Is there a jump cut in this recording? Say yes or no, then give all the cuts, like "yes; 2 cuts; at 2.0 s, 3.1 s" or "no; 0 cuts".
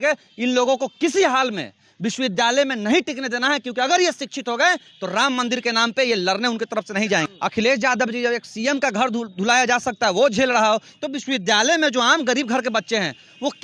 yes; 1 cut; at 7.3 s